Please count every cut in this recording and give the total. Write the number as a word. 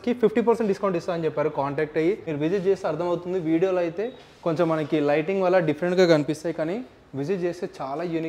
one